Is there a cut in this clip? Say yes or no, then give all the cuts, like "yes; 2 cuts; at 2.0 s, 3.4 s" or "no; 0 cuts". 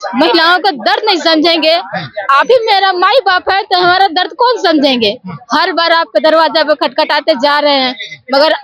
no; 0 cuts